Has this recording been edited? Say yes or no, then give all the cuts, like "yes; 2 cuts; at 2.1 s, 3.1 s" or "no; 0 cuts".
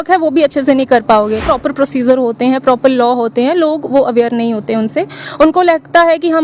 yes; 1 cut; at 1.5 s